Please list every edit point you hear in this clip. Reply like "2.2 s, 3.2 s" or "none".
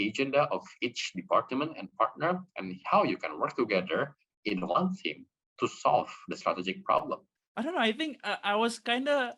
7.3 s